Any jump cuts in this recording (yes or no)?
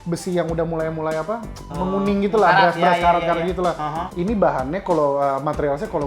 yes